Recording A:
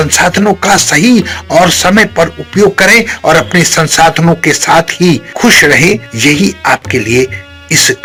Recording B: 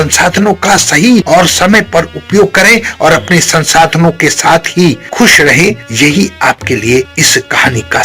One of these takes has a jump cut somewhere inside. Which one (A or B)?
B